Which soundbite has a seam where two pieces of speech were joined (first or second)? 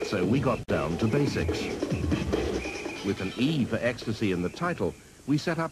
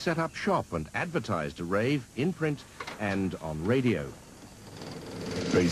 first